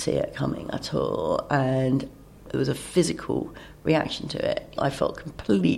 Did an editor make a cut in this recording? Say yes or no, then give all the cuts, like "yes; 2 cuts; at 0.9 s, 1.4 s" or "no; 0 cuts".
yes; 2 cuts; at 2.5 s, 4.7 s